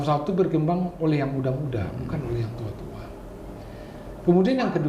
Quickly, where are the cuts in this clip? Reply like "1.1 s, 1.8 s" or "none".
none